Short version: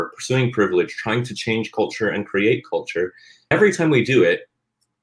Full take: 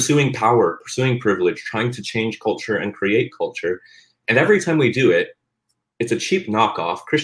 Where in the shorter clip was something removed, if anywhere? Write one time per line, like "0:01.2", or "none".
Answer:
0:03.5